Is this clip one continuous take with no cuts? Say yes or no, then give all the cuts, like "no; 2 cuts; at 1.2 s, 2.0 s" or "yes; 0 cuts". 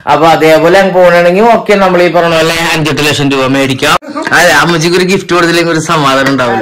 no; 1 cut; at 4.1 s